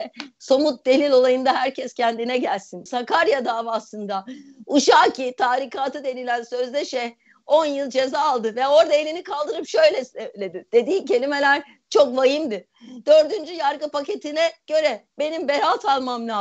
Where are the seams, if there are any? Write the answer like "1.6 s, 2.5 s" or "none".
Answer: 2.8 s